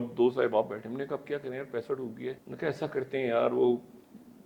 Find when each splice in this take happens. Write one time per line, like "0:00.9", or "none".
0:02.5